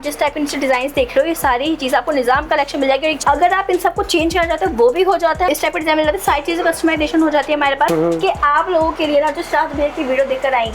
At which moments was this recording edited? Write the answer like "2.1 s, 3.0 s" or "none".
3.2 s, 5.5 s, 7.9 s